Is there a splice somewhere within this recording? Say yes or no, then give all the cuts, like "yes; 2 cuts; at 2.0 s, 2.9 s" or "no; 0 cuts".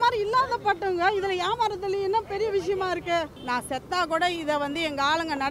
yes; 1 cut; at 3.4 s